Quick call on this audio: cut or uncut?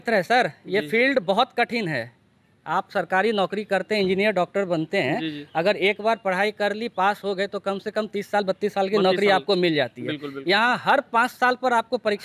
uncut